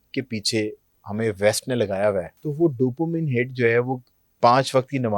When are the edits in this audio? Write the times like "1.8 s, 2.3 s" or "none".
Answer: 2.4 s